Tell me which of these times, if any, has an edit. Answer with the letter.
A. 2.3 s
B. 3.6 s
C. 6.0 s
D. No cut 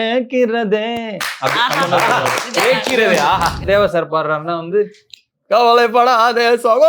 B